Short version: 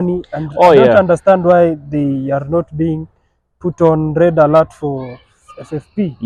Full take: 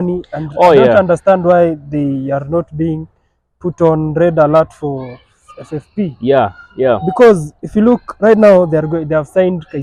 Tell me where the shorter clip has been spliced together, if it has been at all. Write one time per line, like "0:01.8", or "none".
none